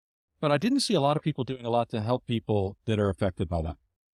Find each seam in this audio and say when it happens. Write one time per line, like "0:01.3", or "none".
none